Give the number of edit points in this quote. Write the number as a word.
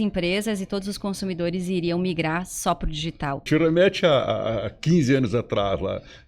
one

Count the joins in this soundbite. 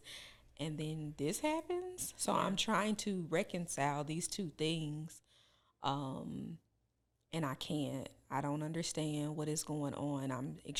zero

